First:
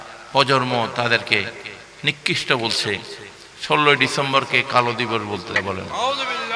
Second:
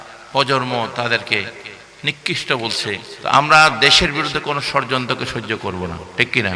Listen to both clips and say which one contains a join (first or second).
second